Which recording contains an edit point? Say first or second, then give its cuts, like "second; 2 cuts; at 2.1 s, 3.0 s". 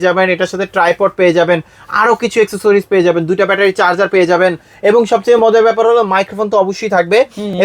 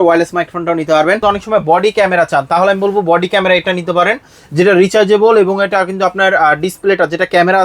second; 1 cut; at 1.2 s